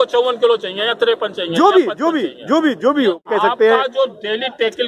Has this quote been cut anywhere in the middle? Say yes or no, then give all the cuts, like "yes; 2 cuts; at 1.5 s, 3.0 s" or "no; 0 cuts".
yes; 1 cut; at 3.3 s